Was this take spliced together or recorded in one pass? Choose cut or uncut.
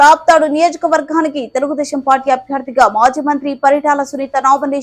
uncut